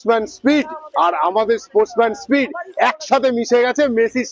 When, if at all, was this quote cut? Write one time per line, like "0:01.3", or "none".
none